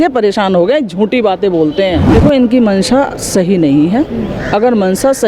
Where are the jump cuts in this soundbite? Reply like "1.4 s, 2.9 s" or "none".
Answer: 2.1 s